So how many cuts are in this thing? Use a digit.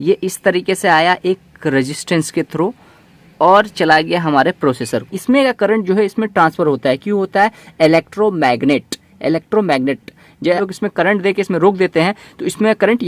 2